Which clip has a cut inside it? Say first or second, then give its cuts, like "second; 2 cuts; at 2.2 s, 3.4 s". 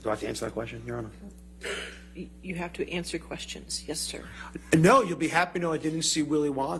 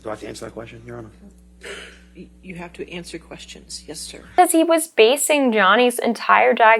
second; 1 cut; at 4.3 s